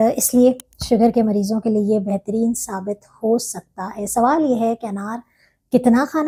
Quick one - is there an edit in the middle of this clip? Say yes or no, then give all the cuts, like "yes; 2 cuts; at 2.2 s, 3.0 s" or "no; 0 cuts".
no; 0 cuts